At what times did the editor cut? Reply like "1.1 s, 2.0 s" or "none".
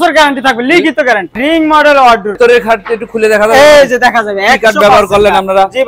1.4 s, 2.3 s